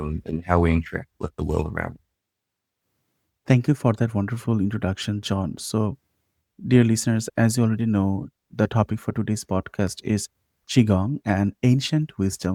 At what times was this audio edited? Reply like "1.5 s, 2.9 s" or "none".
none

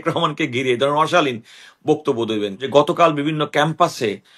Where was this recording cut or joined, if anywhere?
2.6 s

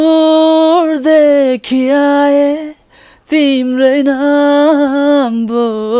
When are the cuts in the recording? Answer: none

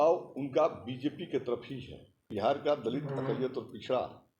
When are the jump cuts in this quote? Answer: 2.2 s

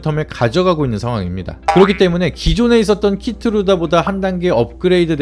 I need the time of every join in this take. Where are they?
1.5 s

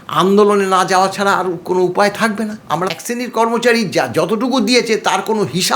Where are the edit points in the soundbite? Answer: 2.9 s

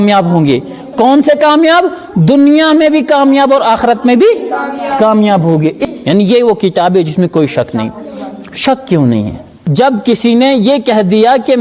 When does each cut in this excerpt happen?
5.8 s, 9.6 s

